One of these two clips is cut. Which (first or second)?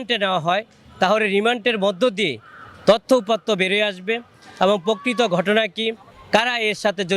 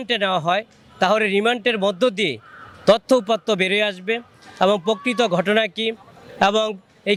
first